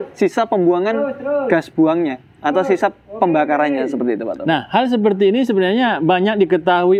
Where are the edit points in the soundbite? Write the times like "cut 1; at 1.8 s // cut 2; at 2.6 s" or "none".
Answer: none